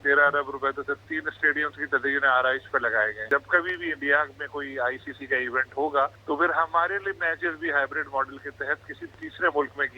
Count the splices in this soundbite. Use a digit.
3